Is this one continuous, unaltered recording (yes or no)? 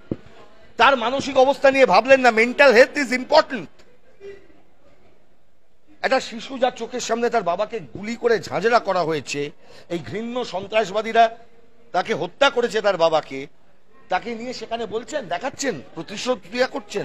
yes